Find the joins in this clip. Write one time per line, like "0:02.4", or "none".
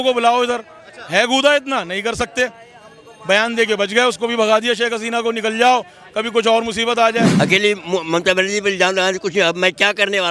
0:07.3